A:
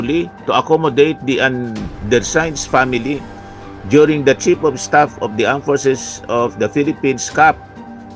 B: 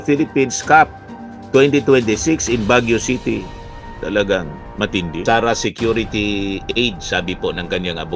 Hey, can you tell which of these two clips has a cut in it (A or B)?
B